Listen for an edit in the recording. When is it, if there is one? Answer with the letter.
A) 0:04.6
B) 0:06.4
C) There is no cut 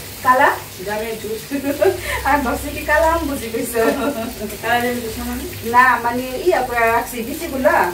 C